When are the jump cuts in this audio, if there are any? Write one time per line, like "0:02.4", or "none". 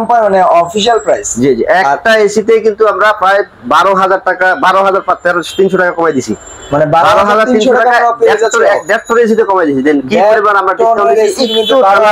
none